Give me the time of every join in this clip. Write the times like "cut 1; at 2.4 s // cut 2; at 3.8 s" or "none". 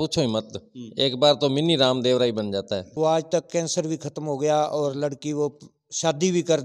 cut 1; at 2.8 s